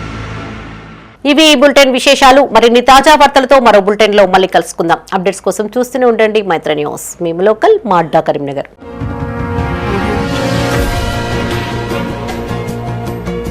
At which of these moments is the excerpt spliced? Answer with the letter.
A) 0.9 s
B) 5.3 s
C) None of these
C